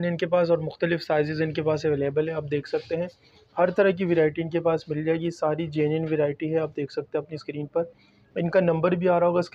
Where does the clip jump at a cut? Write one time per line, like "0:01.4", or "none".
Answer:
none